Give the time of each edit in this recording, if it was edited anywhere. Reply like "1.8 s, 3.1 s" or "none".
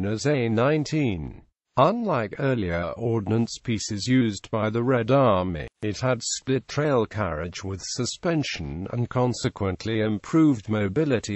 none